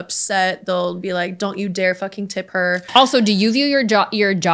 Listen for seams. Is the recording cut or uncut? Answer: cut